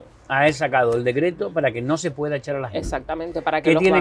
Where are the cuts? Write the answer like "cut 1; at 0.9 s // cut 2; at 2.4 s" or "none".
none